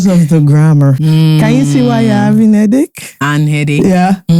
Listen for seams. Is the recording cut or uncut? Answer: cut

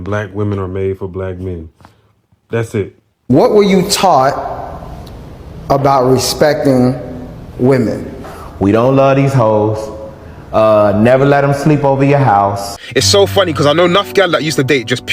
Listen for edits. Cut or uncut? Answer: cut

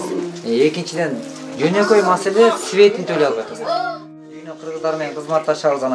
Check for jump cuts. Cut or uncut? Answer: cut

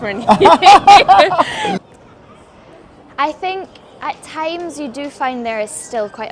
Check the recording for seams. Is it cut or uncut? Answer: cut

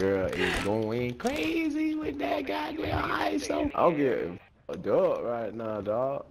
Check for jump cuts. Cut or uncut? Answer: cut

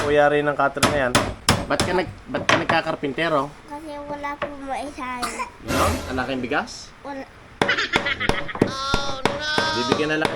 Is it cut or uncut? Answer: cut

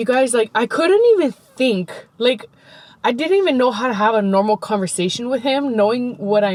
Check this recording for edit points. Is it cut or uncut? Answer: uncut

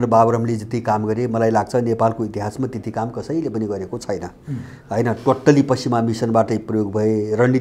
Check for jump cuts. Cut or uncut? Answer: uncut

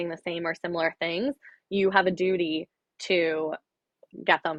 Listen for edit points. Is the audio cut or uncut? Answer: uncut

